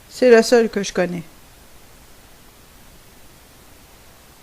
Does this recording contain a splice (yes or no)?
yes